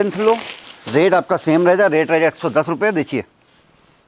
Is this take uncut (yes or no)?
yes